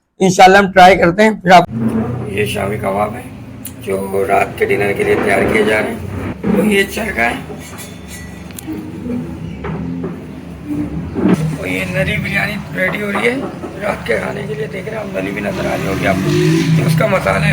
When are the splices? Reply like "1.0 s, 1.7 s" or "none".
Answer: 1.7 s